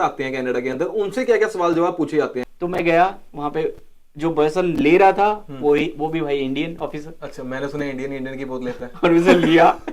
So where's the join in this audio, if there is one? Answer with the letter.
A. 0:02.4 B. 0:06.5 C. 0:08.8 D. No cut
A